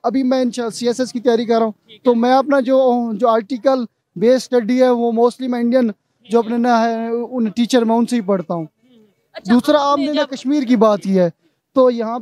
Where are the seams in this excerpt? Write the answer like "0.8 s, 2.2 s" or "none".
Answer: none